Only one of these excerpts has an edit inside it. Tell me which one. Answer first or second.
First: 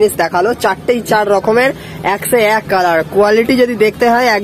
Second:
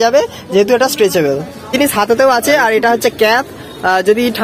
second